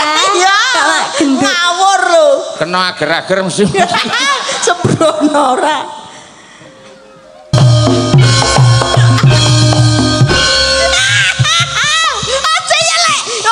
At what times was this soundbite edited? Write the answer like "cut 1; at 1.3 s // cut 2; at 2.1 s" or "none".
cut 1; at 7.5 s